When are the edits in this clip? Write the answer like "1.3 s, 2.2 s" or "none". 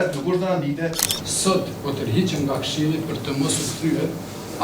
1.1 s